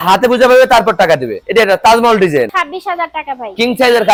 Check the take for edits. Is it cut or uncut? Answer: uncut